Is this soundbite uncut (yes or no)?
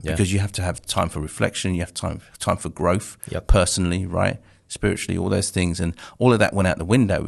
yes